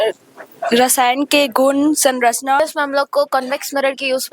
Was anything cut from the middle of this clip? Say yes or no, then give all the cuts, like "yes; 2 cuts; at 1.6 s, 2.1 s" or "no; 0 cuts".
yes; 1 cut; at 2.6 s